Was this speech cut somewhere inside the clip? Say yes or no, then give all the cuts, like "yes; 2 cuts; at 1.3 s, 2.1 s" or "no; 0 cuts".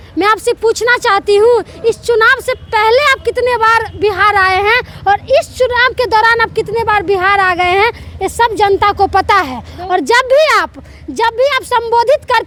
no; 0 cuts